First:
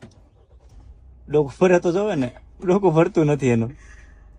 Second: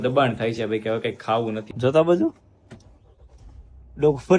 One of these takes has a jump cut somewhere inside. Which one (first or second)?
second